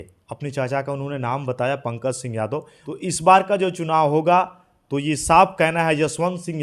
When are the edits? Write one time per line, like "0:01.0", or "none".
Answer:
0:03.0